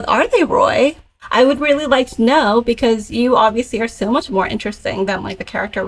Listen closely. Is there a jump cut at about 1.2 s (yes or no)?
yes